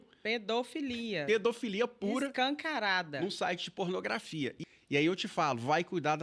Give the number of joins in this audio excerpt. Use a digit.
1